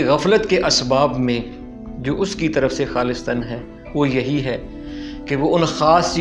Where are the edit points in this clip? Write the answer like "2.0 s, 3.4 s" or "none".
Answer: none

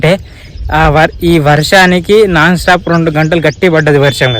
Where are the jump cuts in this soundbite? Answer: none

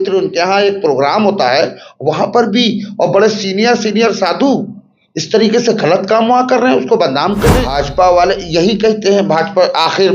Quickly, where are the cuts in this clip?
7.6 s

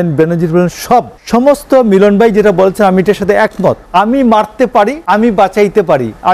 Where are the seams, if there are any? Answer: 1.2 s, 3.8 s, 5.0 s

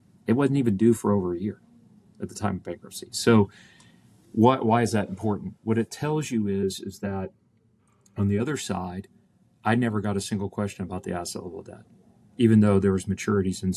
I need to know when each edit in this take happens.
none

